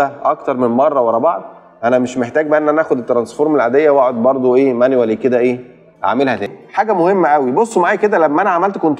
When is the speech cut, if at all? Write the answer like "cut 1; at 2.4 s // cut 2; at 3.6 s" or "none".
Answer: cut 1; at 6.5 s